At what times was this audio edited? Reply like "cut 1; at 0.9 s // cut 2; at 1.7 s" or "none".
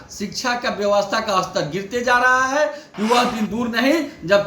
cut 1; at 2.8 s